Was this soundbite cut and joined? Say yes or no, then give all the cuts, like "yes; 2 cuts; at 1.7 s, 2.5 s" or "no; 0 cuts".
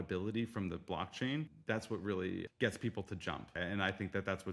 yes; 3 cuts; at 1.5 s, 2.5 s, 3.5 s